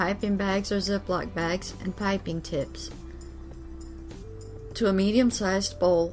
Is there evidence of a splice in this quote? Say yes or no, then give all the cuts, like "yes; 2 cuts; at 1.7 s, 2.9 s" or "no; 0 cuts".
yes; 2 cuts; at 2.7 s, 4.6 s